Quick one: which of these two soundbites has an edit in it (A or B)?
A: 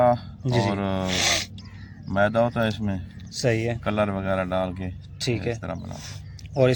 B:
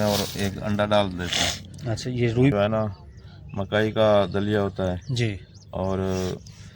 B